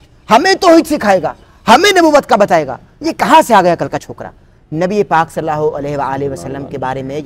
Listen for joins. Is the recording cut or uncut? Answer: uncut